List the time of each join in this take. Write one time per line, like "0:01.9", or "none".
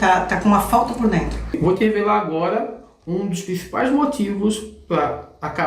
0:01.5

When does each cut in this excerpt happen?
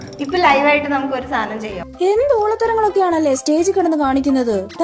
0:01.8

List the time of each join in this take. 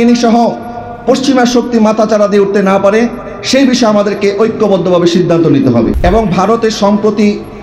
0:06.0

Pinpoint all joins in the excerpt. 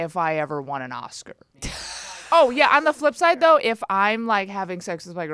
0:01.6

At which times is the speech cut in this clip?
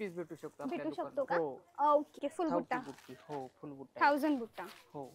0:02.2

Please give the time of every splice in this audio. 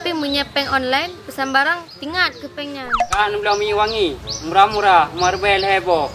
0:03.2

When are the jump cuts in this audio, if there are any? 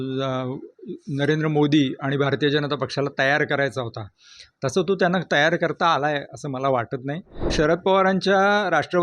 0:07.5

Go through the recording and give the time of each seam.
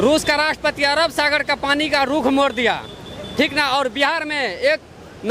none

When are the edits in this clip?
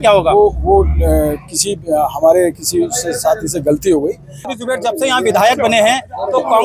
0:04.5

